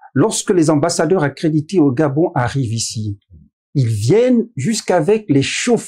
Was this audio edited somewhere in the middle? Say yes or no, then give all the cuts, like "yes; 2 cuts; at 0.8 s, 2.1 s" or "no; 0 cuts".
no; 0 cuts